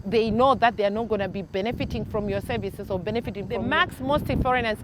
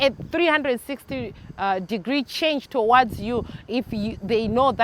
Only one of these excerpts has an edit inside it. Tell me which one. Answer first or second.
first